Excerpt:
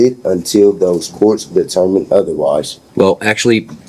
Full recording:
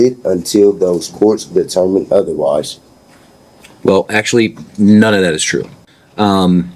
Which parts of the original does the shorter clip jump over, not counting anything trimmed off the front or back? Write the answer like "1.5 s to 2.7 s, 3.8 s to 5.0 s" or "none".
2.8 s to 3.7 s